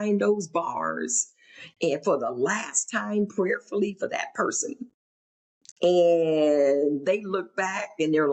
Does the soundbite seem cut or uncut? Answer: uncut